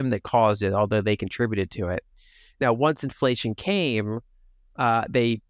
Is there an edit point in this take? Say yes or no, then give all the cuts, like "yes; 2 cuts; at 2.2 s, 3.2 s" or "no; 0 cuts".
no; 0 cuts